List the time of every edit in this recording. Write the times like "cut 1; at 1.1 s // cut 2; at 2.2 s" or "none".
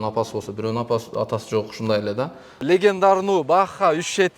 cut 1; at 2.6 s